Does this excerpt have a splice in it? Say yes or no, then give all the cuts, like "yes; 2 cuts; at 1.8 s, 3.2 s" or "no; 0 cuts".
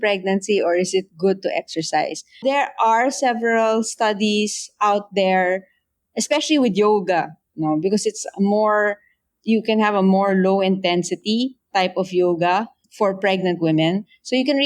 yes; 2 cuts; at 2.4 s, 12.8 s